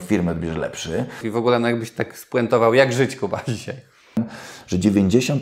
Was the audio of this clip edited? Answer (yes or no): yes